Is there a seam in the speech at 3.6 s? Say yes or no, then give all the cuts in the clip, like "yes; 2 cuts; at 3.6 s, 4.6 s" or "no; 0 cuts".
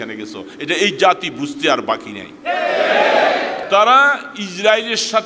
yes; 1 cut; at 3.6 s